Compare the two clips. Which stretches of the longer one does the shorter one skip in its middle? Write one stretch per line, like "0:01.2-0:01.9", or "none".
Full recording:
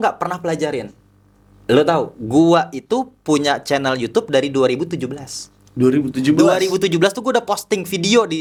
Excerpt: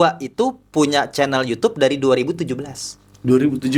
none